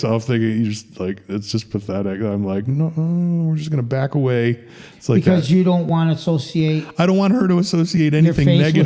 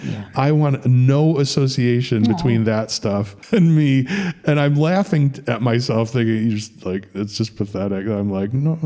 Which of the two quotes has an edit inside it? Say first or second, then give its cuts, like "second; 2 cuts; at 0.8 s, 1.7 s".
second; 1 cut; at 3.3 s